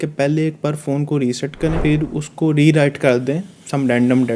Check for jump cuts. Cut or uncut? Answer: cut